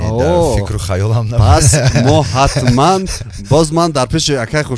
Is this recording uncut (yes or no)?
yes